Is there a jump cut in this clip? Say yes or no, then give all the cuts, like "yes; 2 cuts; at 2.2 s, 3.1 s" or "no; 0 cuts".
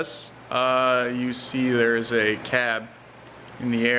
no; 0 cuts